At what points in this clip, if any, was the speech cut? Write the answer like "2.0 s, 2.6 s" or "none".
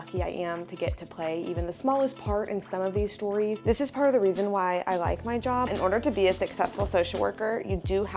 3.6 s, 5.7 s